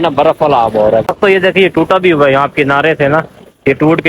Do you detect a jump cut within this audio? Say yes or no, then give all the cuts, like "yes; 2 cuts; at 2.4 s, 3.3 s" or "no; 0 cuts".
yes; 1 cut; at 1.1 s